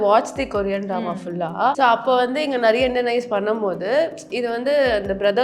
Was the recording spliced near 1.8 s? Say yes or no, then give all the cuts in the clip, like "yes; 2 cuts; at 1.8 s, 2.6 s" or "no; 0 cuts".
yes; 1 cut; at 1.8 s